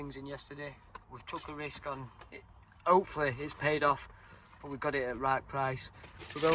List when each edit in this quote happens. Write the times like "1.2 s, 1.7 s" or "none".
none